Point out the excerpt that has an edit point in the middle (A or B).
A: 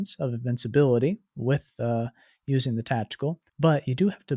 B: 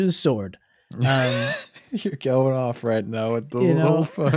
A